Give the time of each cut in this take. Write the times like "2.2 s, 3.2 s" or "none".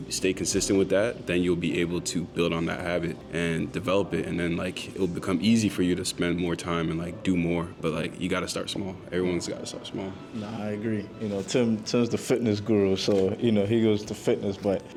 none